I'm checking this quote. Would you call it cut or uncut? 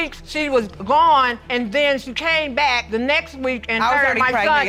uncut